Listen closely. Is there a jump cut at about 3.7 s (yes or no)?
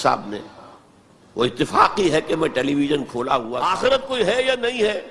yes